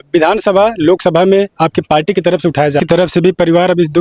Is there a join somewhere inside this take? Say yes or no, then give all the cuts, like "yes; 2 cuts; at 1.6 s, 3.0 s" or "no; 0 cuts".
yes; 1 cut; at 2.8 s